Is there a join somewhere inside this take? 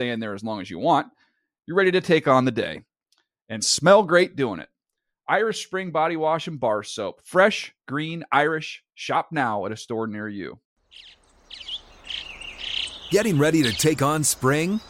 yes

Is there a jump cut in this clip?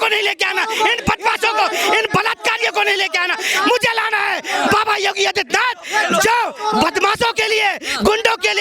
no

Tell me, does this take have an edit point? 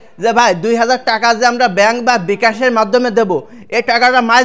no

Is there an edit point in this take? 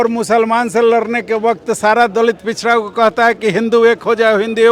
no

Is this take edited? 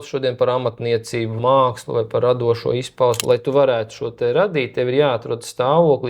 yes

